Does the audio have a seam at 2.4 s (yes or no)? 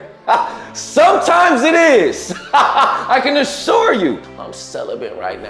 no